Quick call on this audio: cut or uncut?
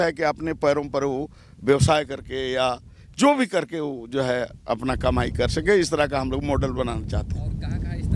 uncut